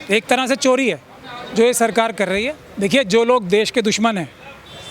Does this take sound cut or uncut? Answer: cut